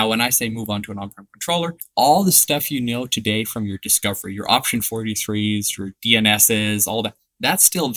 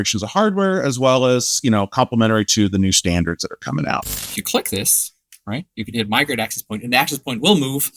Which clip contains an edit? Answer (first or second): second